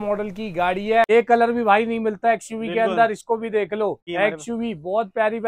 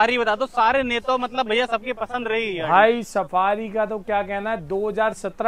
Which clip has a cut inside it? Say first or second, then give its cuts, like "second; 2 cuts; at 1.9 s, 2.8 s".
first; 2 cuts; at 1.1 s, 4.0 s